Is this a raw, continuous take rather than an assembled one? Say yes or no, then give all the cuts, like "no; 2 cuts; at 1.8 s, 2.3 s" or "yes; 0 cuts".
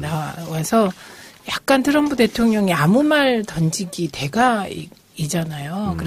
yes; 0 cuts